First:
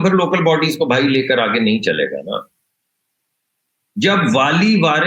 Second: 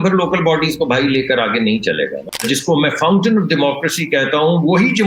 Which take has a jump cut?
second; 1 cut; at 2.4 s

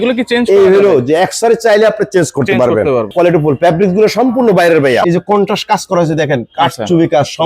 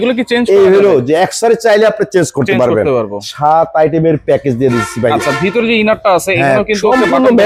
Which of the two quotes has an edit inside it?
first; 2 cuts; at 3.1 s, 5.0 s

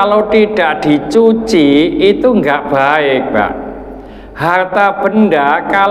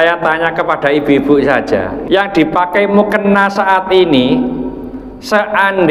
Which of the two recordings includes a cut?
second; 1 cut; at 1.9 s

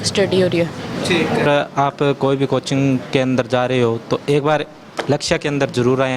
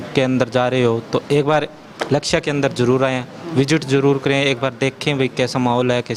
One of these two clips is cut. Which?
first; 1 cut; at 1.5 s

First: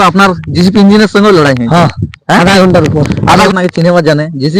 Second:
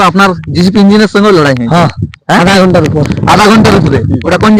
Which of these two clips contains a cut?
first; 1 cut; at 3.4 s

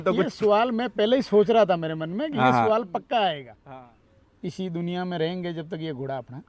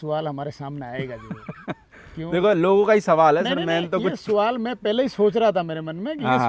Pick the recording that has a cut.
first; 1 cut; at 3.6 s

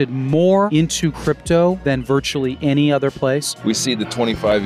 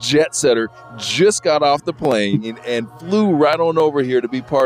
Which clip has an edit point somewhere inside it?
first; 3 cuts; at 0.9 s, 2.2 s, 3.5 s

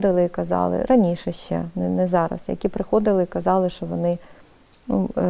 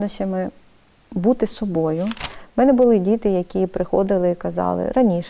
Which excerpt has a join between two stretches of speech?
second; 1 cut; at 2.2 s

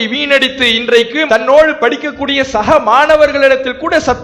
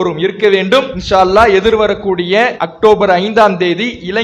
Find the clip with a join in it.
second; 2 cuts; at 1.0 s, 2.6 s

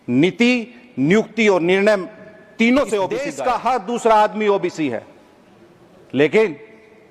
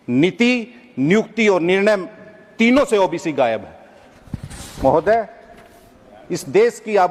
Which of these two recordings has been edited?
first; 1 cut; at 3.3 s

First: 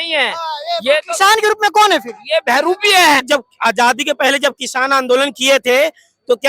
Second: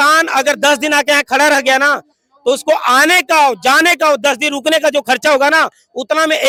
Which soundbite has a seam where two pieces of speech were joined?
first; 1 cut; at 3.3 s

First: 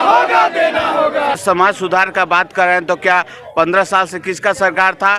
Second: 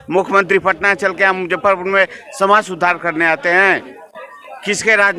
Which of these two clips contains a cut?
first; 1 cut; at 1.4 s

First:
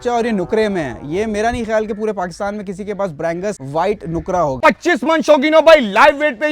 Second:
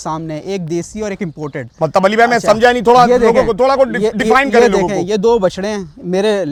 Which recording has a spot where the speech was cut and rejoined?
first; 2 cuts; at 3.6 s, 4.6 s

